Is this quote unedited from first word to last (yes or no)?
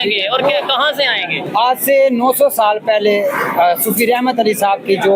no